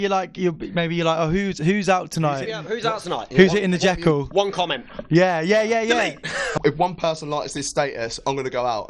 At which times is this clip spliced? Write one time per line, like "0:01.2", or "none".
0:02.7
0:06.5